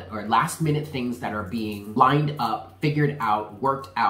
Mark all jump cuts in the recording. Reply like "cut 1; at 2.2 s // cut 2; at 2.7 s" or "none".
cut 1; at 1.9 s

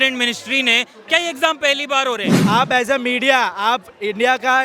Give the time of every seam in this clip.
cut 1; at 2.3 s

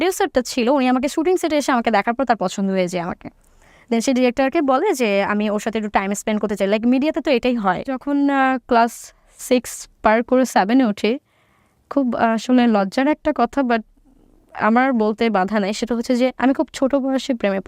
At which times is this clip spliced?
cut 1; at 8.0 s

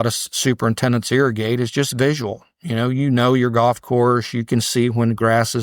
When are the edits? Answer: none

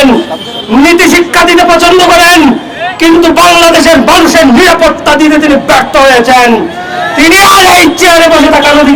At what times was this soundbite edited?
none

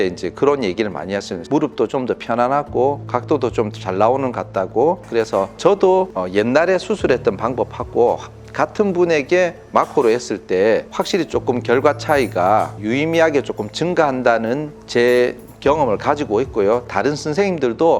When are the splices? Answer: cut 1; at 1.4 s // cut 2; at 5.0 s

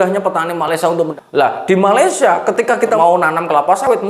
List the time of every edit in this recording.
cut 1; at 1.1 s // cut 2; at 3.0 s

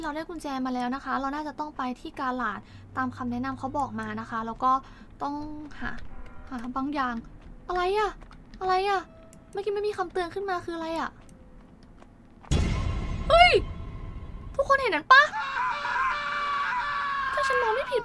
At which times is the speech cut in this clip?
none

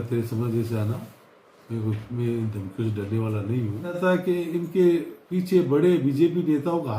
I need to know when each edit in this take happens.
cut 1; at 4.0 s

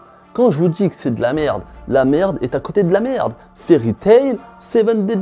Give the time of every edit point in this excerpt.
none

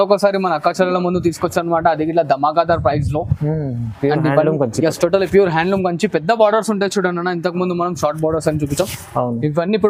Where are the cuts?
none

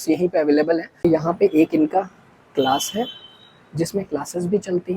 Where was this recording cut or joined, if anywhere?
cut 1; at 1.1 s

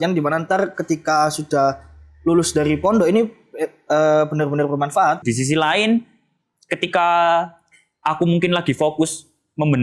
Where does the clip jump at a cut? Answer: cut 1; at 5.2 s

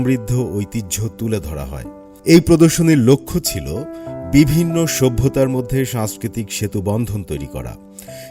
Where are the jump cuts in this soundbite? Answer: none

